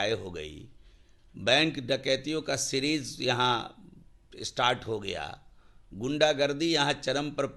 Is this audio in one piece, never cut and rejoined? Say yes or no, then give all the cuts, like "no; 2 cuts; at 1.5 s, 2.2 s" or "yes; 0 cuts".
yes; 0 cuts